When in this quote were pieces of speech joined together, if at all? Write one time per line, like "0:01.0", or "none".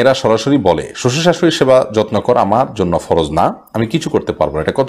none